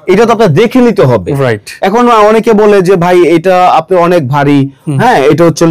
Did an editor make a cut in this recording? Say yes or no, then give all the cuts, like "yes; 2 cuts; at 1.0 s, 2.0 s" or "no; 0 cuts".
no; 0 cuts